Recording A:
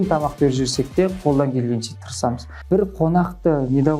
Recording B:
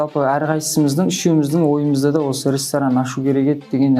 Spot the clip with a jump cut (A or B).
A